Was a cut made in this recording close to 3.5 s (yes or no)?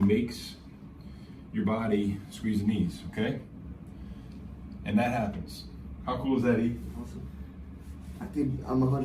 yes